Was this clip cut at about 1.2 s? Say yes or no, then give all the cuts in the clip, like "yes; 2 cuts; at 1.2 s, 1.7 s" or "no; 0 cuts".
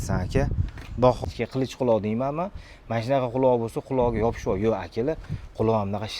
yes; 1 cut; at 1.2 s